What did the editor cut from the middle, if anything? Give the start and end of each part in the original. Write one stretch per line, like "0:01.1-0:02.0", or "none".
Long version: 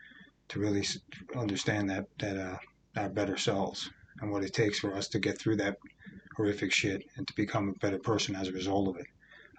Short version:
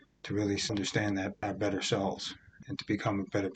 0:01.3-0:02.6
0:04.1-0:07.1